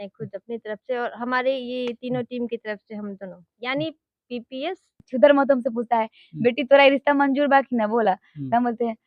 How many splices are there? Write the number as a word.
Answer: one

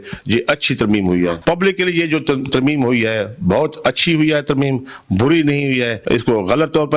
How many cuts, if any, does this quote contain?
two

